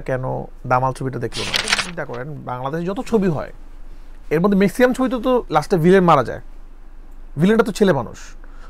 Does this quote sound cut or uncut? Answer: cut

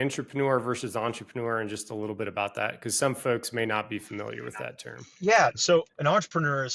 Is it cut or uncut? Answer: cut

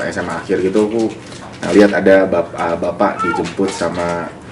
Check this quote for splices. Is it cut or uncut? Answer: uncut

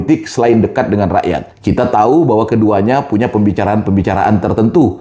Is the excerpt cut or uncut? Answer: cut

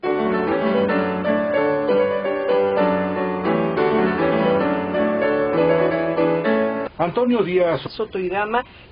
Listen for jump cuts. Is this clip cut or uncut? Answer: uncut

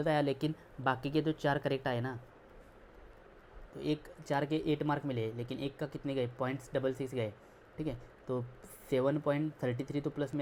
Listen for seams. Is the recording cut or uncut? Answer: uncut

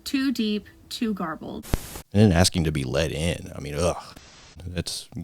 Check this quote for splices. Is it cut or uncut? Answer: cut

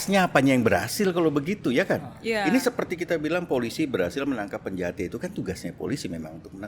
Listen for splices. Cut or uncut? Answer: uncut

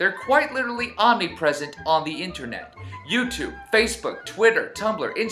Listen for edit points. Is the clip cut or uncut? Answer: cut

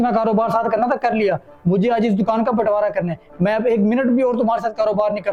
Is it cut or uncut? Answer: uncut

